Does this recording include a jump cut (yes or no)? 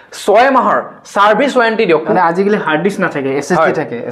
yes